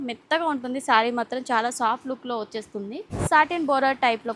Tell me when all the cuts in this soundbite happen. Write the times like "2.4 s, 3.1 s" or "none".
3.1 s